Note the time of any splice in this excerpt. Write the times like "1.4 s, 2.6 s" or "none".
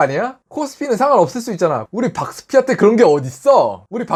none